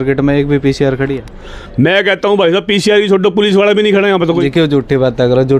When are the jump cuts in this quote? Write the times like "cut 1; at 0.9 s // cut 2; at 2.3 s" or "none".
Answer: cut 1; at 4.4 s